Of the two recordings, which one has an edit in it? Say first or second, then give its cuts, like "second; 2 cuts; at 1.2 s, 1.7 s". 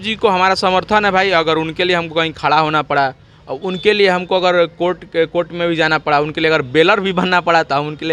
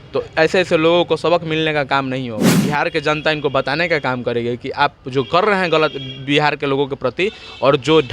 second; 1 cut; at 2.5 s